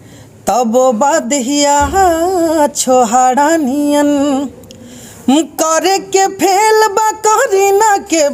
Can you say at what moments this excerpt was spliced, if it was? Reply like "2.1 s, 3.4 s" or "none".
none